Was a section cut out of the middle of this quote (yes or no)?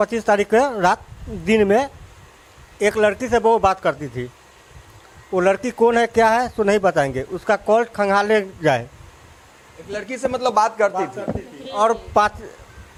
no